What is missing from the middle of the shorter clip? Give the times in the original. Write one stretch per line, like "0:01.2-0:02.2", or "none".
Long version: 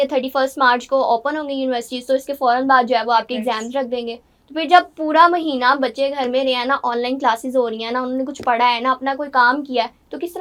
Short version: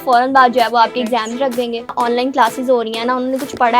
0:04.3-0:06.8